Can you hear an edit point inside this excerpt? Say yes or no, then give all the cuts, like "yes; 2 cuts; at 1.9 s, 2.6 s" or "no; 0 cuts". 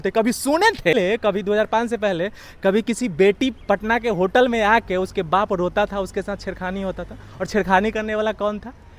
yes; 1 cut; at 0.9 s